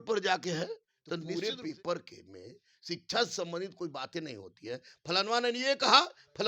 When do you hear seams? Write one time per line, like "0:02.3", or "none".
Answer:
0:01.3